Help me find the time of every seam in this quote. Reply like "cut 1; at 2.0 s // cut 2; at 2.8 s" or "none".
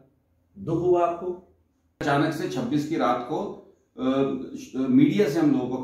cut 1; at 2.0 s